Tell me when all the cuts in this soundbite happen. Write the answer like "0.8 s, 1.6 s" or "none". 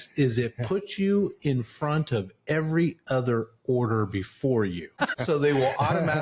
5.0 s

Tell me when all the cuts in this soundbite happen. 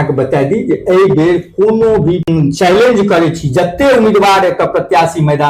2.2 s

